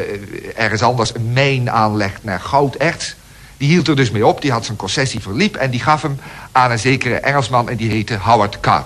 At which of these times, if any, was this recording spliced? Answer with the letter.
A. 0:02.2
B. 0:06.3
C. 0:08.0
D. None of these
B